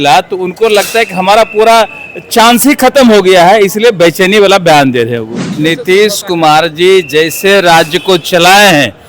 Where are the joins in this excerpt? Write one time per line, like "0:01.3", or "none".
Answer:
0:05.5